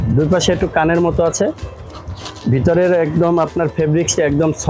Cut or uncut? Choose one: uncut